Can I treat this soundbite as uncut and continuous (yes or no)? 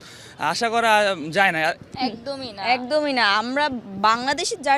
no